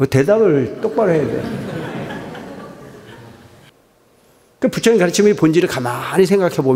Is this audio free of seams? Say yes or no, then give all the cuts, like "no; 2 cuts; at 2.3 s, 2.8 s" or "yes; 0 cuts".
no; 1 cut; at 3.7 s